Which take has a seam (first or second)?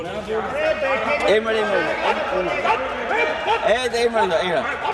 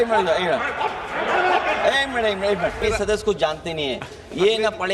second